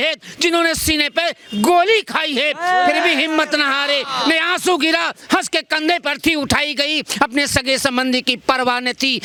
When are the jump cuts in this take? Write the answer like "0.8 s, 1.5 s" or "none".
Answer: none